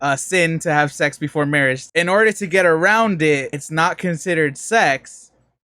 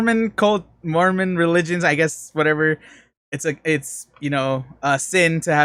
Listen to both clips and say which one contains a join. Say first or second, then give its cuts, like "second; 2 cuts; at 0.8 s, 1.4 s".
first; 2 cuts; at 1.8 s, 3.6 s